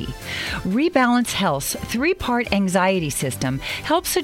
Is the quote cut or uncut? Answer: uncut